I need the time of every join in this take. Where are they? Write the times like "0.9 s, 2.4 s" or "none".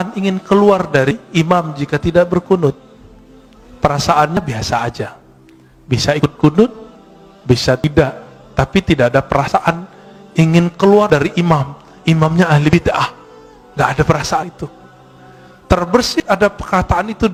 none